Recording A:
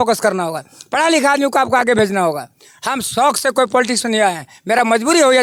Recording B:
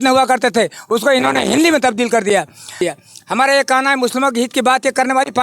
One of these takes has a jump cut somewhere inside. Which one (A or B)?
B